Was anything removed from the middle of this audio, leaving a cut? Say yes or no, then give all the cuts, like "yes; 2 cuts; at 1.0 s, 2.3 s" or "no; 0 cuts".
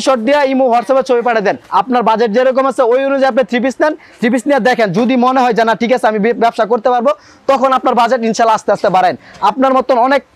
no; 0 cuts